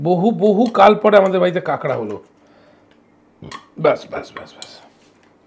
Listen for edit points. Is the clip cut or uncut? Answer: uncut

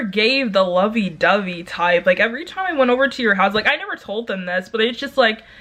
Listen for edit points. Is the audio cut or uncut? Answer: uncut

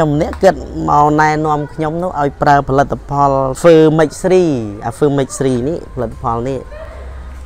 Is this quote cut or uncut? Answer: cut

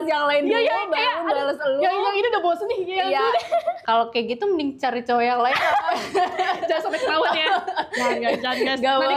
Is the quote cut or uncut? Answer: cut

